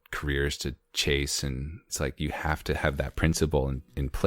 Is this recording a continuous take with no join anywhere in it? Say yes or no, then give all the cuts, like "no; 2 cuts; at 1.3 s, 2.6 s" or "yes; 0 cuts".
no; 1 cut; at 1.9 s